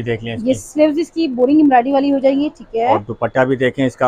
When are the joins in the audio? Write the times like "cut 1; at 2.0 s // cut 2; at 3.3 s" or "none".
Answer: none